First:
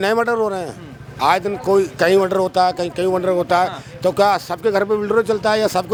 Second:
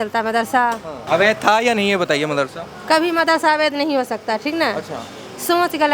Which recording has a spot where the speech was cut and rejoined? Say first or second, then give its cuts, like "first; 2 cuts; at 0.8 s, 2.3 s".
second; 1 cut; at 1.0 s